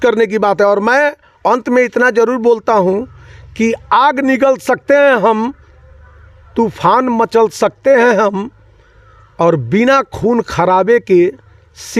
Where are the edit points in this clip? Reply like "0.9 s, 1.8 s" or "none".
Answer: none